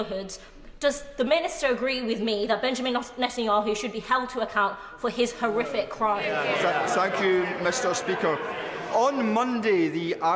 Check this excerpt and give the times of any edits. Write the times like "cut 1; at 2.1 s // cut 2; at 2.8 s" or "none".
cut 1; at 6.2 s